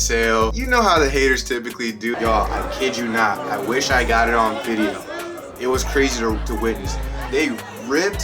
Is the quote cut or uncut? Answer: cut